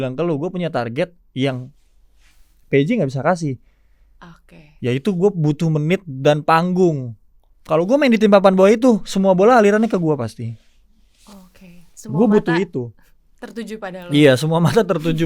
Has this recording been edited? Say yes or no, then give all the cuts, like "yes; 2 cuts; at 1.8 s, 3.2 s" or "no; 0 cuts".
no; 0 cuts